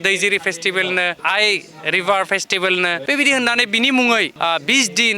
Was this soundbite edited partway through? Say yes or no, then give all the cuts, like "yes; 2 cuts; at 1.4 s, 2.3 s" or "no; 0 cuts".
yes; 3 cuts; at 1.2 s, 3.0 s, 4.3 s